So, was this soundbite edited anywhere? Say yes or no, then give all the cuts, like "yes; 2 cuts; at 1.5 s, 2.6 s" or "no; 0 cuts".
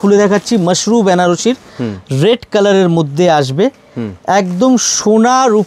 no; 0 cuts